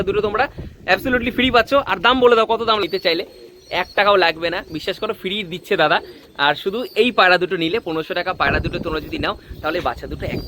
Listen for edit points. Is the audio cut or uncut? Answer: cut